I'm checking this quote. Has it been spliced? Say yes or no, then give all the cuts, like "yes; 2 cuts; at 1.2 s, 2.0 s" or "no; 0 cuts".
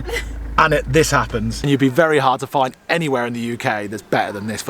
yes; 1 cut; at 1.7 s